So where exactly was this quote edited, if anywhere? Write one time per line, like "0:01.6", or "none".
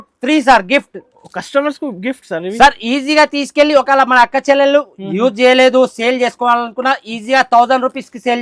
none